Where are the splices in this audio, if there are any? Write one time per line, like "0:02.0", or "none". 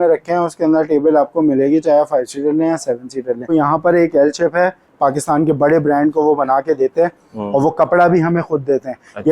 0:03.5
0:04.9